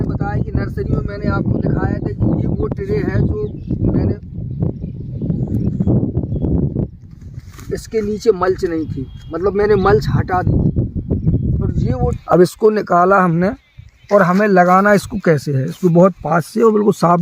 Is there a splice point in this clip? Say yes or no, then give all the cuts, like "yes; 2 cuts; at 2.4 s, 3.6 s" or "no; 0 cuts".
yes; 1 cut; at 12.2 s